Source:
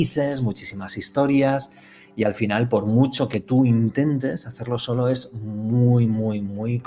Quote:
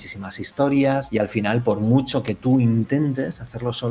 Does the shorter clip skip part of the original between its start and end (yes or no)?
yes